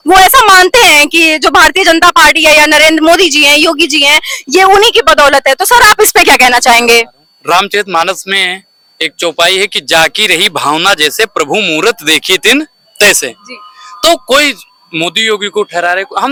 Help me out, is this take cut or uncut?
uncut